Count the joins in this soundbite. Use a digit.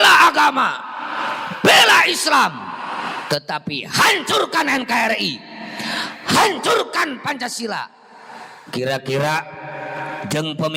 0